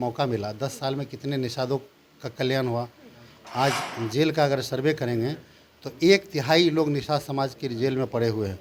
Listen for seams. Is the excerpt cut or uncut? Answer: uncut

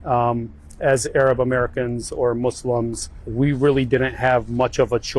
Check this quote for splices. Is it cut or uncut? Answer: uncut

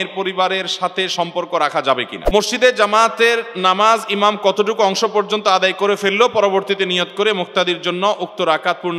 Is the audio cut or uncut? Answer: cut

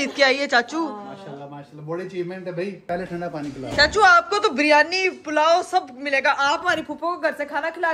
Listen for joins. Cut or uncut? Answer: uncut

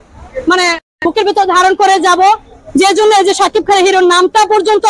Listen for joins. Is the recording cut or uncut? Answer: uncut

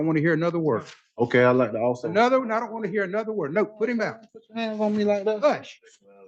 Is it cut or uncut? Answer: uncut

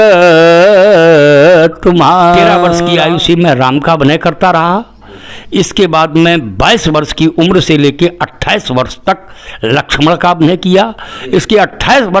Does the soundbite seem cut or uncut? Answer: cut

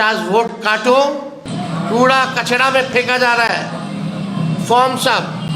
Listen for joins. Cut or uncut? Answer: cut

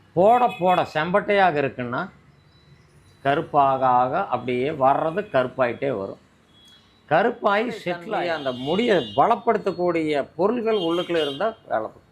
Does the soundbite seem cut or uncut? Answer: cut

